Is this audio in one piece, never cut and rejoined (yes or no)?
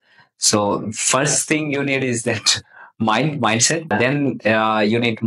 no